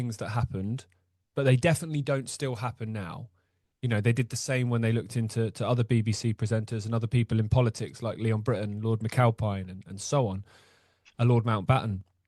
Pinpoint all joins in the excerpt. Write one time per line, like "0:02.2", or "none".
none